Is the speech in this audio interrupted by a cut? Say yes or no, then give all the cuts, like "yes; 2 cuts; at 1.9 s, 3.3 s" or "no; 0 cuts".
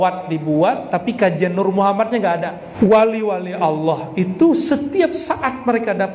yes; 1 cut; at 2.6 s